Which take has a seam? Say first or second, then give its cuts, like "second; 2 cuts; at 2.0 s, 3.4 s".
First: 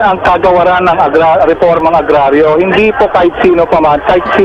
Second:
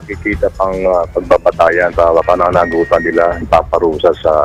second; 2 cuts; at 1.9 s, 3.4 s